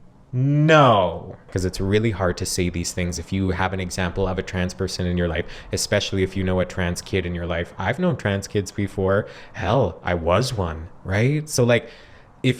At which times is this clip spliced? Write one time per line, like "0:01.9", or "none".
0:01.5